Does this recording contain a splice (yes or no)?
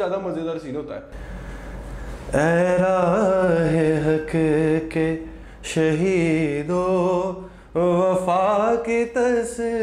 yes